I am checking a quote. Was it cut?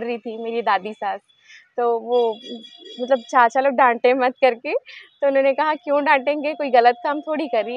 no; 0 cuts

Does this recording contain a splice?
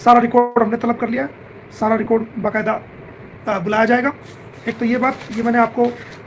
no; 0 cuts

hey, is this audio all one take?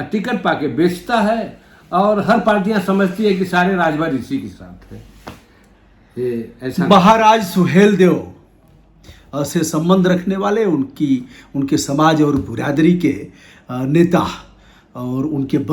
yes; 0 cuts

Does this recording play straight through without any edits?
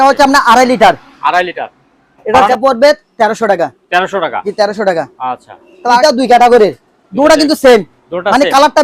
no; 2 cuts; at 2.5 s, 6.0 s

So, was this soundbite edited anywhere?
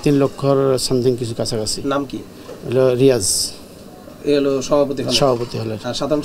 no; 0 cuts

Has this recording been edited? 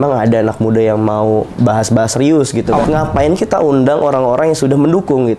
yes; 1 cut; at 2.8 s

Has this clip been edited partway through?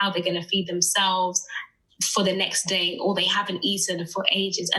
no; 0 cuts

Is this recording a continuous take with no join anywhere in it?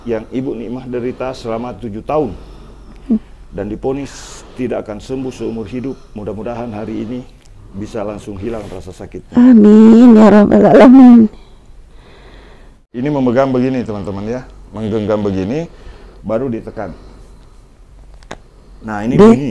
no; 1 cut; at 13.0 s

